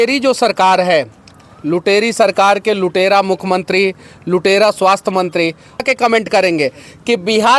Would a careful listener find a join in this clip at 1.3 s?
no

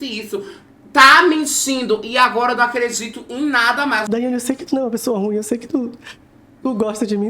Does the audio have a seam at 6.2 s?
no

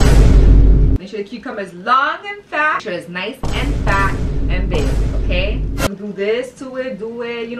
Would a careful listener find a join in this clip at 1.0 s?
yes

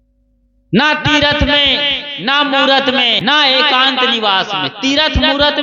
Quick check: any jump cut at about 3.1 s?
yes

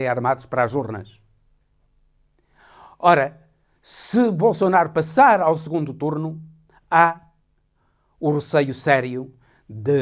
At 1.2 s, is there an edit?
no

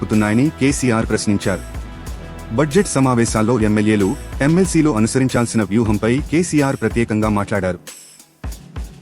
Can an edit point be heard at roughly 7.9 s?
yes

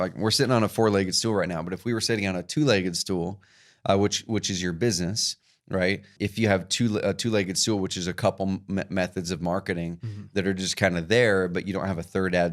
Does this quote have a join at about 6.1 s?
yes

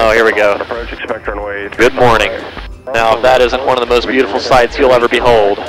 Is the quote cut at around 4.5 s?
no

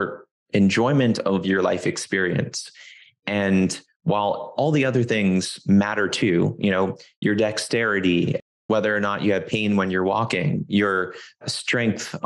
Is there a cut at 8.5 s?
yes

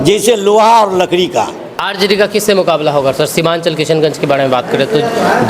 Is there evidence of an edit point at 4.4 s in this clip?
no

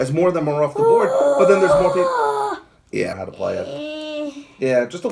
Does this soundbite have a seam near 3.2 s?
yes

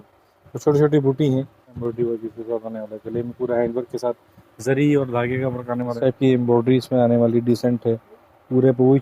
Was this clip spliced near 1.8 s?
yes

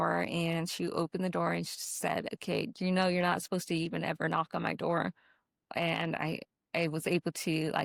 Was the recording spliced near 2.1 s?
no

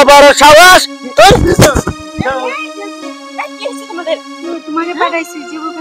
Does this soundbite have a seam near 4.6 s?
no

